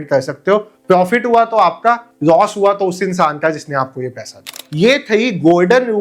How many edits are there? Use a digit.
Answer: 1